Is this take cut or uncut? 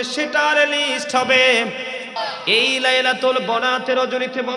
cut